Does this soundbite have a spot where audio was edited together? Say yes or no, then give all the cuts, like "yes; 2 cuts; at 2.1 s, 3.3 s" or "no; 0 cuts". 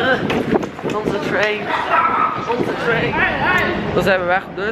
yes; 1 cut; at 3.0 s